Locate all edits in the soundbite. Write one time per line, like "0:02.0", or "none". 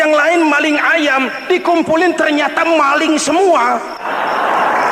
0:04.0